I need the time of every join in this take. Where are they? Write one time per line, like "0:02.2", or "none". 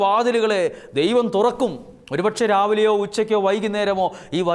none